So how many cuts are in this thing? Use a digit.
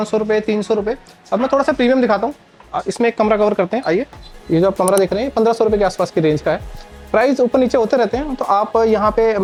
0